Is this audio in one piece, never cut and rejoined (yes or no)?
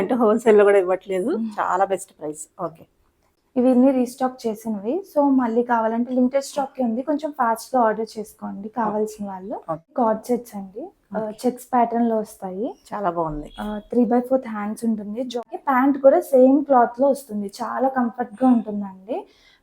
no